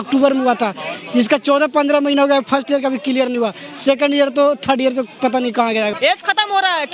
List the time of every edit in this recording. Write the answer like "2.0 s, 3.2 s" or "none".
6.0 s